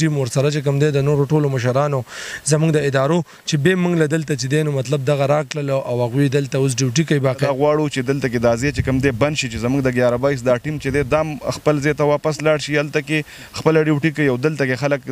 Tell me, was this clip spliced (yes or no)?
yes